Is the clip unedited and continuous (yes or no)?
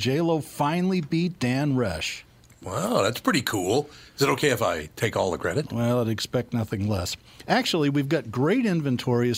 yes